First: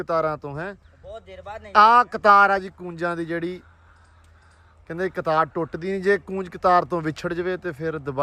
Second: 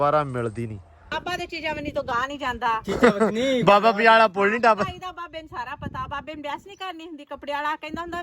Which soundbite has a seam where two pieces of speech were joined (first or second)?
second